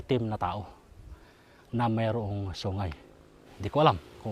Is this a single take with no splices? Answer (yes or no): no